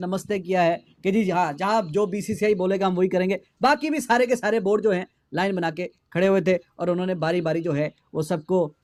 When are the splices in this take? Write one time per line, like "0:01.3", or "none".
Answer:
none